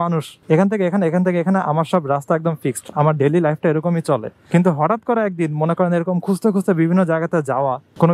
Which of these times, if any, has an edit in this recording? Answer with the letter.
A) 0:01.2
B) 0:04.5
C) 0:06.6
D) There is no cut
D